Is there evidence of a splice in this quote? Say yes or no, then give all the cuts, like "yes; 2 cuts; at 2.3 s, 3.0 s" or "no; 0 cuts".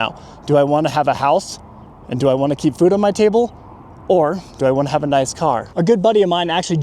yes; 1 cut; at 5.7 s